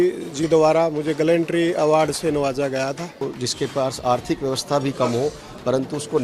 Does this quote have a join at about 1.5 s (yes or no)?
no